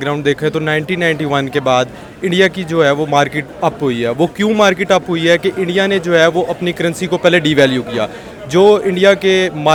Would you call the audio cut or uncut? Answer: uncut